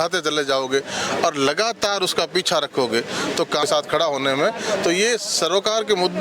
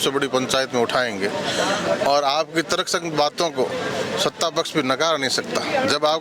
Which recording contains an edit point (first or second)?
first